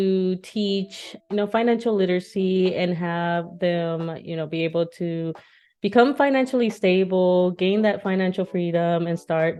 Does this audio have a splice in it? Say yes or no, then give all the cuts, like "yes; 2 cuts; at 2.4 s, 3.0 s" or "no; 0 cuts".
no; 0 cuts